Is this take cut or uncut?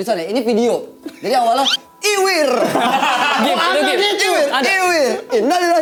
uncut